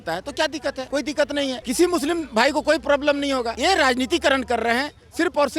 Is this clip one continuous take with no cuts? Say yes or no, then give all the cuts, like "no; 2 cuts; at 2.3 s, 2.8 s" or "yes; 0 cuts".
no; 2 cuts; at 1.1 s, 3.5 s